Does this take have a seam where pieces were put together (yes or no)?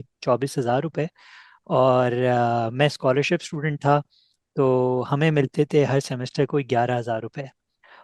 no